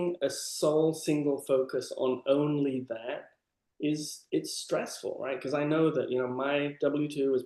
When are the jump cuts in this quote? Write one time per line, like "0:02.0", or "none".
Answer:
none